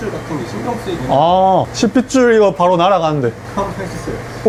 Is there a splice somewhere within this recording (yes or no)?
no